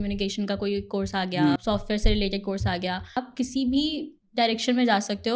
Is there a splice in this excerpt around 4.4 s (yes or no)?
no